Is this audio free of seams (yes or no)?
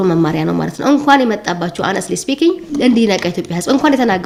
yes